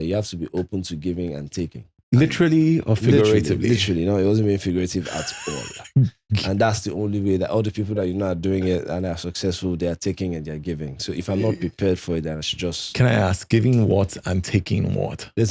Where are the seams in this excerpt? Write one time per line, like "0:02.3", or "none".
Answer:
0:01.9